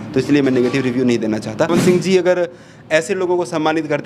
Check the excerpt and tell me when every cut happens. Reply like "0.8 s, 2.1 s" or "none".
1.7 s